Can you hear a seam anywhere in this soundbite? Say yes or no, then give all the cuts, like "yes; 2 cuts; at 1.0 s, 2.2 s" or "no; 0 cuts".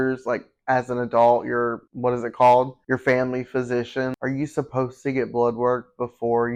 no; 0 cuts